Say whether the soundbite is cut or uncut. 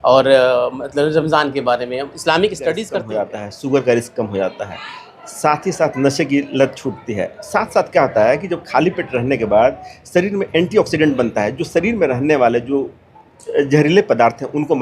cut